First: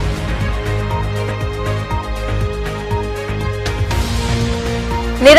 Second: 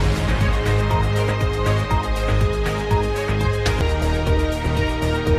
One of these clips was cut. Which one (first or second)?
second